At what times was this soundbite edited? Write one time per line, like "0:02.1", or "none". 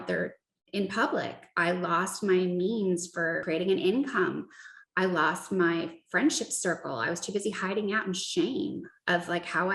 0:03.4